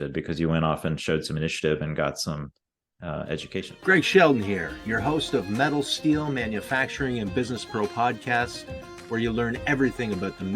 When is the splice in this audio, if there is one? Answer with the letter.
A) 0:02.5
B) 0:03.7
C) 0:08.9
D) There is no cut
B